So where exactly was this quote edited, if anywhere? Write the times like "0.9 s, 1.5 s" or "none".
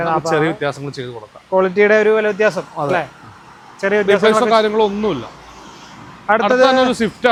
none